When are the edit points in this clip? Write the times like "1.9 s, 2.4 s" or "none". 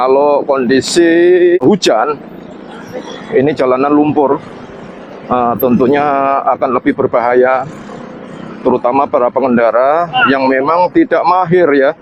1.6 s